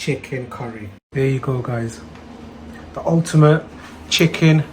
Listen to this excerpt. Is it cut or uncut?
cut